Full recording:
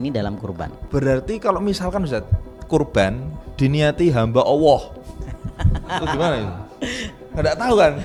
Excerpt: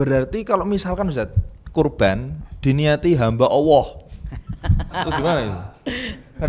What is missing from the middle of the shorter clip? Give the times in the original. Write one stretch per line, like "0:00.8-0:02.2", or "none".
none